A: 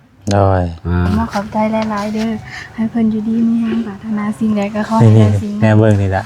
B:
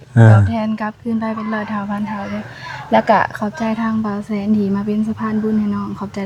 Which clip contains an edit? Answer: A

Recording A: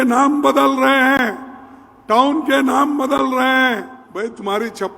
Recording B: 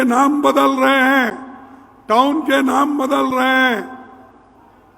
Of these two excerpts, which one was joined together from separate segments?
A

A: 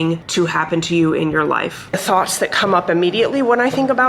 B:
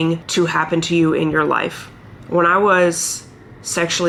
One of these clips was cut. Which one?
A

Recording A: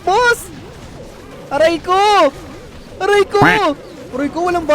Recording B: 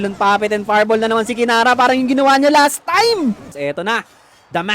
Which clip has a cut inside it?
B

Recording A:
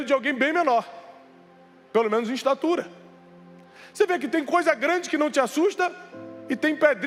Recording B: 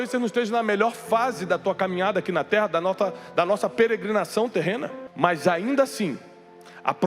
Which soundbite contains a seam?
B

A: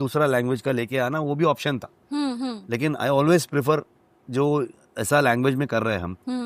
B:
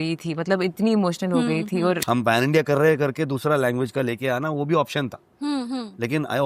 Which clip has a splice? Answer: B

